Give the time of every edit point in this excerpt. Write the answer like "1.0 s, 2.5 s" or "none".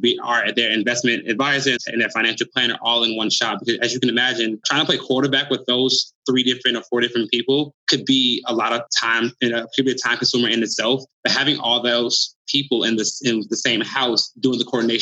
1.8 s